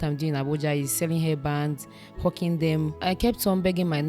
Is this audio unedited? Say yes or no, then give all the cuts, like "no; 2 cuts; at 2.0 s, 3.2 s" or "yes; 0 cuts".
no; 1 cut; at 3.0 s